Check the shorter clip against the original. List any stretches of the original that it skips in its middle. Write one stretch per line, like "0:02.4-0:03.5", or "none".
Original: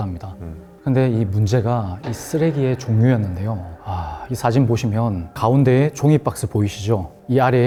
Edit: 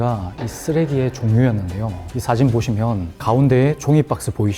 0:03.7-0:04.2